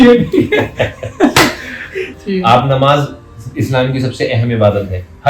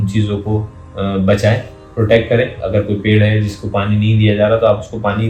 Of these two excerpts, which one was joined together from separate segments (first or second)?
first